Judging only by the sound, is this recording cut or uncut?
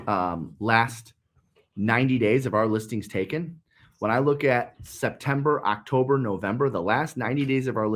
uncut